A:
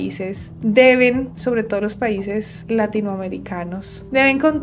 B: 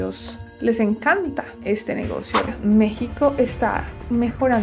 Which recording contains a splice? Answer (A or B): B